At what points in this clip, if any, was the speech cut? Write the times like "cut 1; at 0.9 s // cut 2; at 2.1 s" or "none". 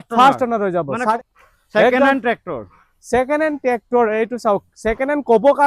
cut 1; at 1.0 s